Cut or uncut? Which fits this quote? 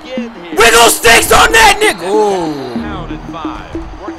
cut